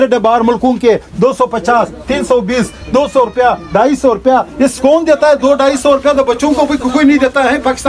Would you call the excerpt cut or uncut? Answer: uncut